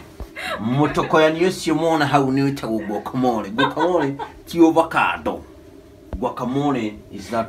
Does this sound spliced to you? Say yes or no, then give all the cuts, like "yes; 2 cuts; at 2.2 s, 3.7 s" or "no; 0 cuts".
no; 0 cuts